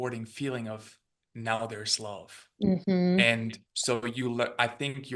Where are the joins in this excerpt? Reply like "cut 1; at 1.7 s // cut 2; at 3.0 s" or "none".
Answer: none